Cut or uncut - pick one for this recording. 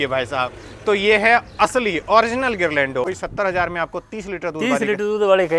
cut